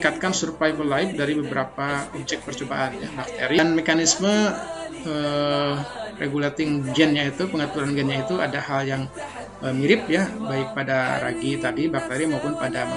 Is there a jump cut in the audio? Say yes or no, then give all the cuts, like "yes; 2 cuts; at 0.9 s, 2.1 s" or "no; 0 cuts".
yes; 1 cut; at 3.6 s